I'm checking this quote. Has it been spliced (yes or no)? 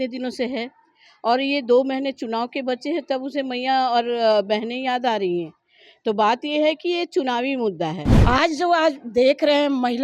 yes